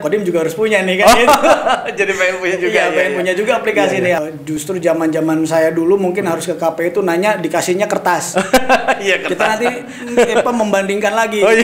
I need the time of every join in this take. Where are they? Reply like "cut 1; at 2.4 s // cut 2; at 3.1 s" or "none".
cut 1; at 4.2 s

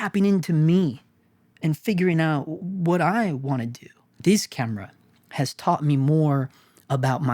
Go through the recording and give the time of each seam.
cut 1; at 2.6 s // cut 2; at 4.0 s

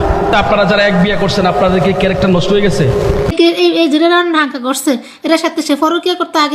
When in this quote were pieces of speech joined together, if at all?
cut 1; at 3.3 s

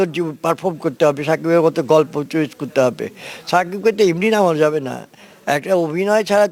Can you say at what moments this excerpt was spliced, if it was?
none

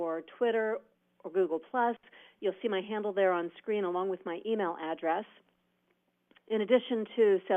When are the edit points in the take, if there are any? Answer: cut 1; at 4.8 s

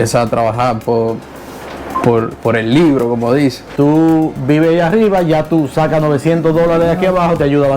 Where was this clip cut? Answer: cut 1; at 3.7 s

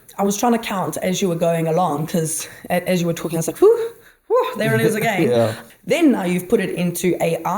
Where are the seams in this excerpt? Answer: cut 1; at 5.6 s

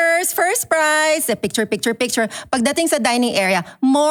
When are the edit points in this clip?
none

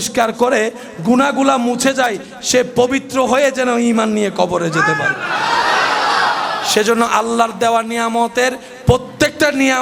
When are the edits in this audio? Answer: none

